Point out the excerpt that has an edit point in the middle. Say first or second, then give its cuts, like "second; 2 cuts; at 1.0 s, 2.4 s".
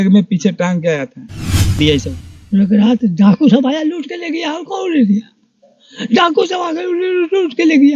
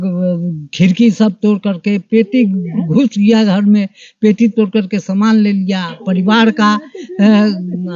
first; 1 cut; at 1.8 s